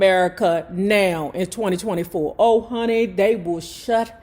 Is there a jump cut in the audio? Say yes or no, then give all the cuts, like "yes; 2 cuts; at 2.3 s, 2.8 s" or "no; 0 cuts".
no; 0 cuts